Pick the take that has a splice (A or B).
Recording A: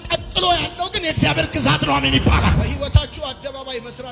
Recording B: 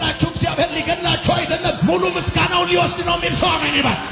A